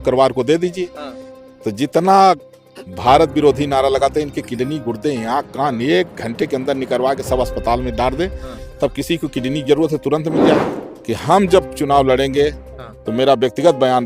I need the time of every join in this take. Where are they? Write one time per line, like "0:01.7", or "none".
0:10.8

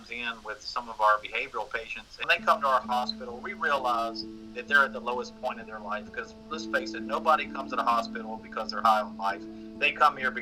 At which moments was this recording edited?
0:02.2

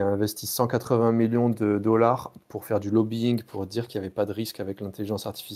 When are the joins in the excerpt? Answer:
none

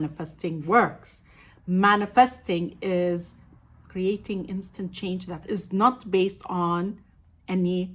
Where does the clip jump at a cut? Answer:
none

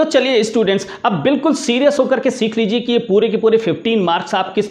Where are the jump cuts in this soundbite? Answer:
none

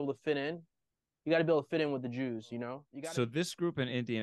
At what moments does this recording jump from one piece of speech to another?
0:02.8

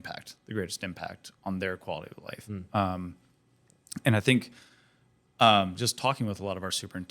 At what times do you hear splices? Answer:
none

